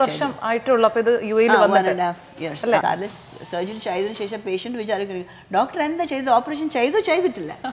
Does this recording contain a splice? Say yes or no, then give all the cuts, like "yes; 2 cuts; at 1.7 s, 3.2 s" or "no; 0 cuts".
yes; 1 cut; at 2.8 s